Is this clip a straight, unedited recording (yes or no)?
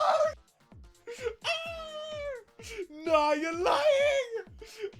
yes